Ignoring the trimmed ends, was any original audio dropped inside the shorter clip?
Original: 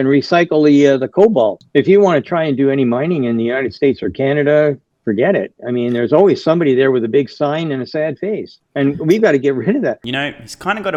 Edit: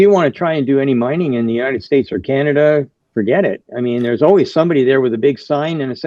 no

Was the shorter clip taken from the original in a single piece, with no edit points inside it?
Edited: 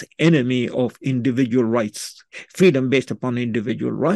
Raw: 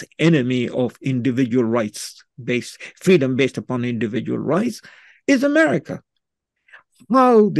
no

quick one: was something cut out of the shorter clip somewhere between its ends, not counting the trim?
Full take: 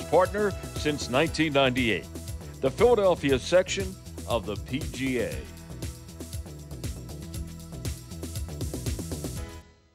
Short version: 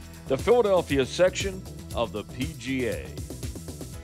yes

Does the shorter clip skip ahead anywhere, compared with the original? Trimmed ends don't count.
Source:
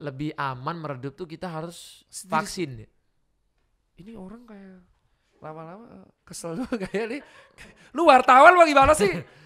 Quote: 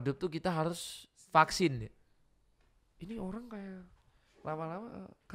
no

